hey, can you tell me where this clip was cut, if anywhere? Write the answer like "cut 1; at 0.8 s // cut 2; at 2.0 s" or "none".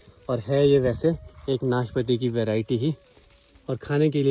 none